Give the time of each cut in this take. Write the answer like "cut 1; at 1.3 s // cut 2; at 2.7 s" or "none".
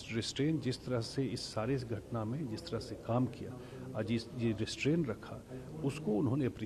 none

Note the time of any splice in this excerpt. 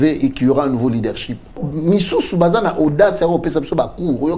cut 1; at 1.6 s

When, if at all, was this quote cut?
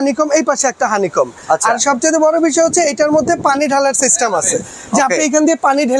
none

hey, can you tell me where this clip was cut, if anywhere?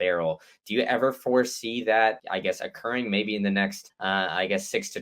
cut 1; at 2.2 s // cut 2; at 3.9 s

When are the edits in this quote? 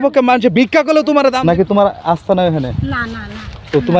cut 1; at 1.4 s

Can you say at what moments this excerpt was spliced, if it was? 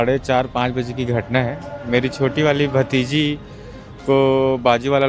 none

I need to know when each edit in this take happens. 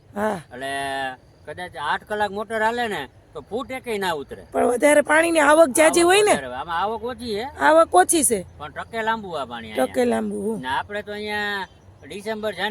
none

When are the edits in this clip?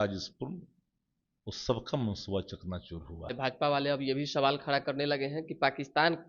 cut 1; at 3.3 s

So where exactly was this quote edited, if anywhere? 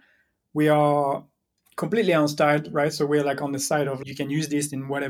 cut 1; at 4.0 s

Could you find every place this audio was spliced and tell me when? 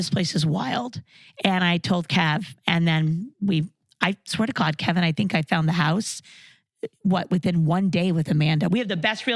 none

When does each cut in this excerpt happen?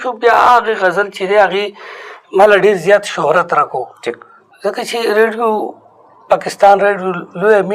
none

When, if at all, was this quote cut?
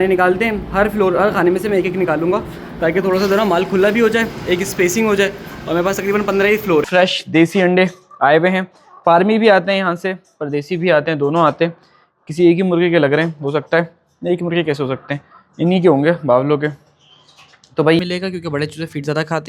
cut 1; at 6.9 s // cut 2; at 18.0 s

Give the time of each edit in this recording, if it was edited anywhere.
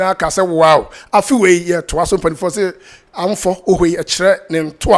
none

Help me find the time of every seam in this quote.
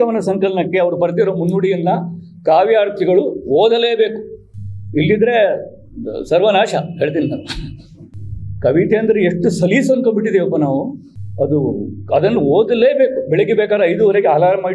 none

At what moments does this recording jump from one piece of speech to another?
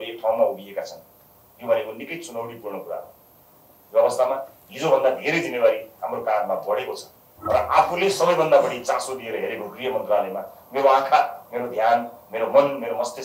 cut 1; at 7.3 s

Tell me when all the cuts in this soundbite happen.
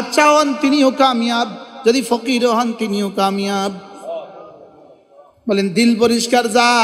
none

